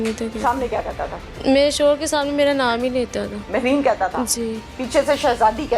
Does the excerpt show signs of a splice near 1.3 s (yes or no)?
yes